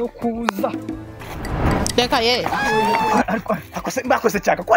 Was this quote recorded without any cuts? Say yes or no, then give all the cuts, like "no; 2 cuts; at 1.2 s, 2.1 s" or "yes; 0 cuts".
no; 2 cuts; at 0.8 s, 2.9 s